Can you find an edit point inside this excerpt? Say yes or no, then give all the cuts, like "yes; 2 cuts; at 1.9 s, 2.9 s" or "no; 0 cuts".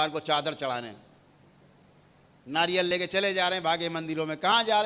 no; 0 cuts